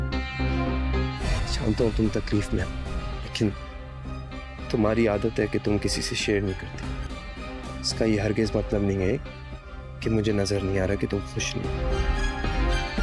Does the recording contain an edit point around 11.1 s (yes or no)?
no